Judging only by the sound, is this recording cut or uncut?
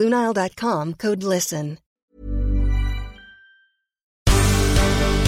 cut